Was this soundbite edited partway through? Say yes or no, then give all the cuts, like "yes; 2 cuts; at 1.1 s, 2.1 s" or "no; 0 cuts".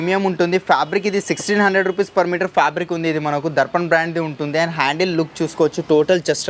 no; 0 cuts